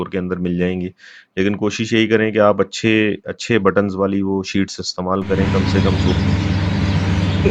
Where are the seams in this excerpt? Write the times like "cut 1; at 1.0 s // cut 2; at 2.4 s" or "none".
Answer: cut 1; at 5.5 s

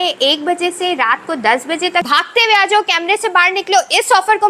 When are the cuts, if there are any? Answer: cut 1; at 2.1 s

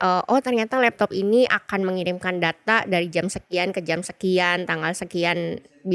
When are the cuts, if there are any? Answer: none

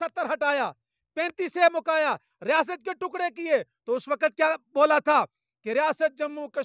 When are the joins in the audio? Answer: none

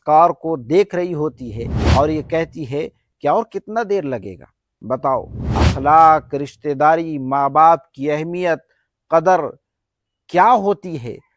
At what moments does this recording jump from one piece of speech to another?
cut 1; at 1.8 s // cut 2; at 5.4 s

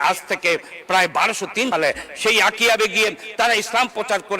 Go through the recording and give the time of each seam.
cut 1; at 1.7 s

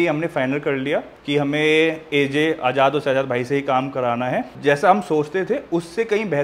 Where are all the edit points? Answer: cut 1; at 1.2 s

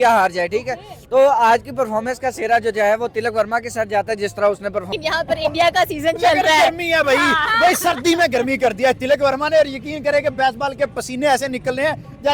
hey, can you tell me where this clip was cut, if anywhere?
cut 1; at 4.9 s

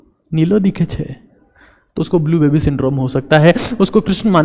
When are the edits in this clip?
none

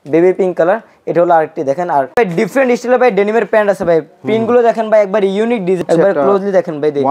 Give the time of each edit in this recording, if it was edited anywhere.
cut 1; at 2.1 s // cut 2; at 5.8 s

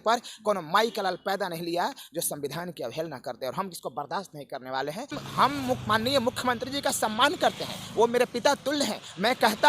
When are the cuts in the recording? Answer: cut 1; at 5.2 s

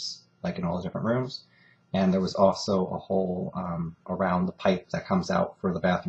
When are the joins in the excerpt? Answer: cut 1; at 4.4 s

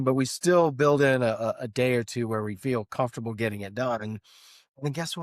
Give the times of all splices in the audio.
none

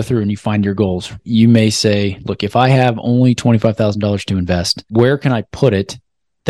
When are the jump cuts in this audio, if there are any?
cut 1; at 1.2 s // cut 2; at 4.8 s

